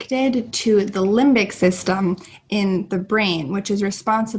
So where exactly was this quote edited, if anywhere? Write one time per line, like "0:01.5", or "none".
none